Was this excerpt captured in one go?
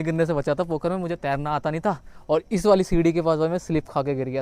yes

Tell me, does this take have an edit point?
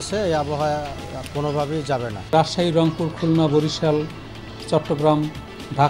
yes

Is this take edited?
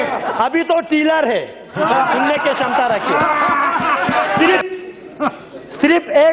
yes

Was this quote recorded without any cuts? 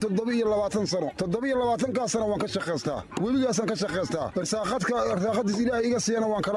yes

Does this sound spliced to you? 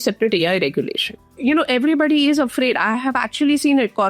yes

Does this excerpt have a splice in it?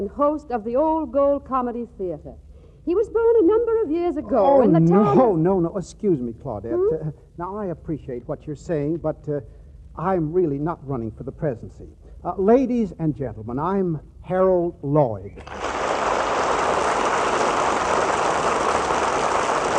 no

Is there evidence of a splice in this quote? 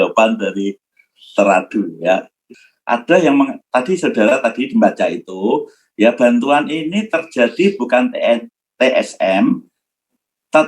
yes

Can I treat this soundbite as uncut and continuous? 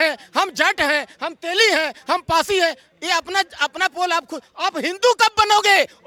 yes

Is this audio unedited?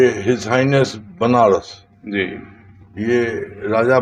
yes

